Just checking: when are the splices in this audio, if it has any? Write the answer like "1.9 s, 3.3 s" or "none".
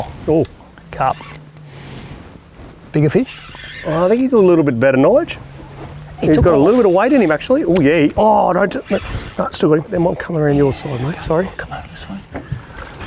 none